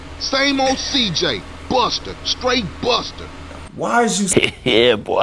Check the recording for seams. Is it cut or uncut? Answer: cut